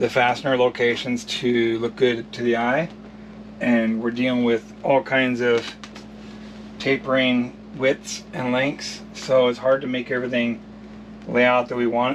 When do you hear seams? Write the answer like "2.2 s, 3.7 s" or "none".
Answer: none